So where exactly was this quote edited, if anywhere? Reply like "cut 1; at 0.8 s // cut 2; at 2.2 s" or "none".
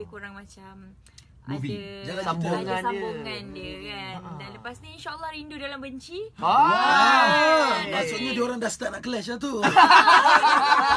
cut 1; at 7.5 s